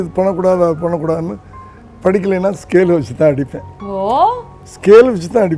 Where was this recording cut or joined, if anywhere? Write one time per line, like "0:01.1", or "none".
none

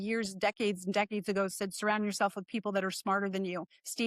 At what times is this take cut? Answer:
none

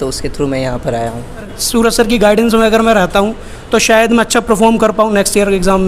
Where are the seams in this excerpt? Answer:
0:01.6

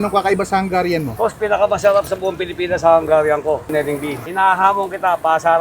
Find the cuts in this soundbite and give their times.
0:03.8

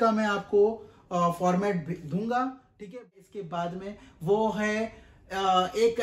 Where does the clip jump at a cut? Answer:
0:02.9

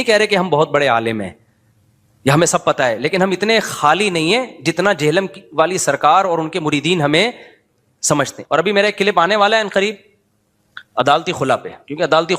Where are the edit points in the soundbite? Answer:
0:08.4

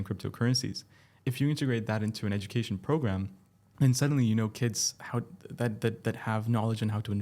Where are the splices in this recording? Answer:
0:01.1

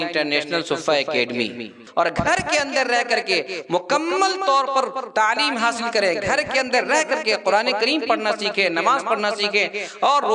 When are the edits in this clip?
0:01.8

